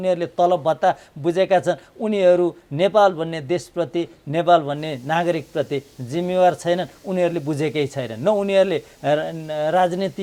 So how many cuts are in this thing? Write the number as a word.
zero